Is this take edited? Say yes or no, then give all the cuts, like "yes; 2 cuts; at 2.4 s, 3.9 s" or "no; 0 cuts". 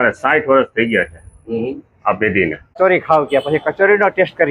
yes; 1 cut; at 2.8 s